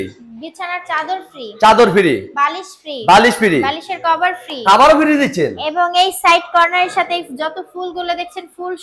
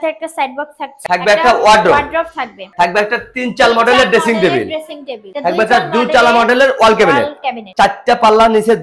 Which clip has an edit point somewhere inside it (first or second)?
second